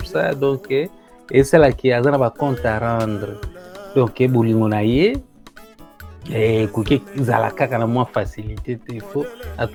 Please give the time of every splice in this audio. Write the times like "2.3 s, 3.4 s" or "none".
none